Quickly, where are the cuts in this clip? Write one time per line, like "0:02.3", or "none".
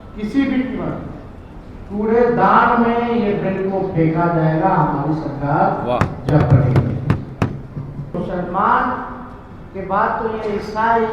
0:08.1